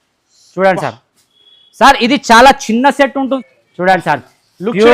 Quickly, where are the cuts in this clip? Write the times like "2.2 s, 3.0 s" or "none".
3.4 s

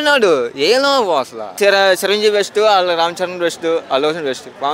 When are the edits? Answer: 1.6 s

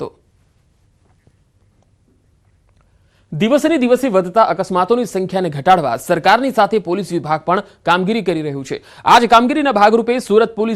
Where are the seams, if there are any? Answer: 6.2 s

